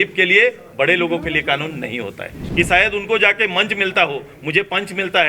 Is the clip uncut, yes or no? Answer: no